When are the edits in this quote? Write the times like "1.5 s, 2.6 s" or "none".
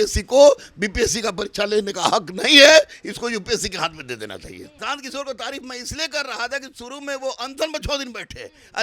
4.7 s